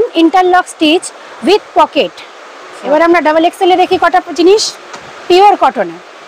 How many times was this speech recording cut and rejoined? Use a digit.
1